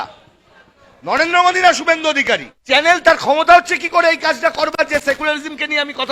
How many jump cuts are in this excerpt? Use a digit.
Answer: 1